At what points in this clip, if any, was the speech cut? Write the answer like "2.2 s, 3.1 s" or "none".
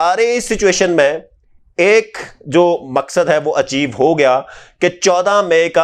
none